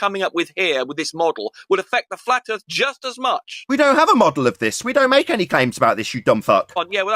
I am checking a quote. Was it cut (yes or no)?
no